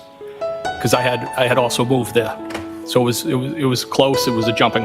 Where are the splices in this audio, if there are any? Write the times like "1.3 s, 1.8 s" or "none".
none